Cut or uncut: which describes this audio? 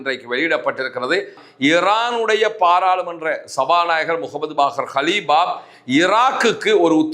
cut